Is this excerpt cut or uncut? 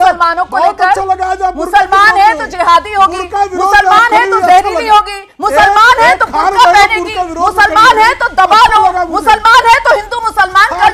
uncut